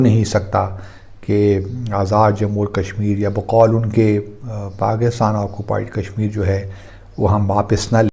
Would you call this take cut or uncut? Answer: uncut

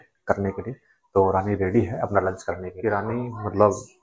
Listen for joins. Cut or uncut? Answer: cut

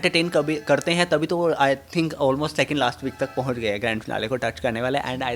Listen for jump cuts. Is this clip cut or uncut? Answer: uncut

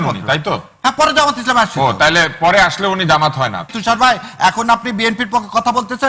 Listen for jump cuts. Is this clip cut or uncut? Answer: cut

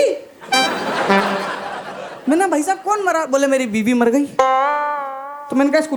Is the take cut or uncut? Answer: uncut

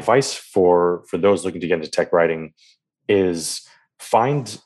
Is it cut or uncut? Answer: uncut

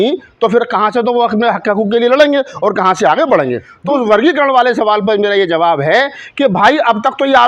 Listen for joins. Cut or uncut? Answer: cut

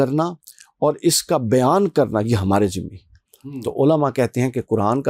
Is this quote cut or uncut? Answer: uncut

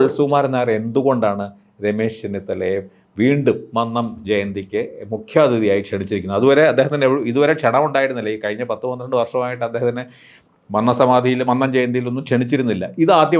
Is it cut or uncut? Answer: uncut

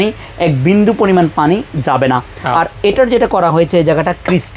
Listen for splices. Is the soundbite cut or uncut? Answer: uncut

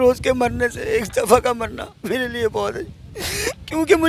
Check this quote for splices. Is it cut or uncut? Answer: uncut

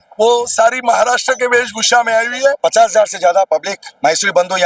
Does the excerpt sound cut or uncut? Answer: cut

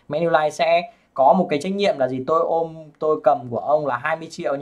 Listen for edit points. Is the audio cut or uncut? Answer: uncut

